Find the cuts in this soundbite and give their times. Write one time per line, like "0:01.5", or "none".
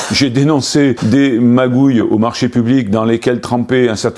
0:01.0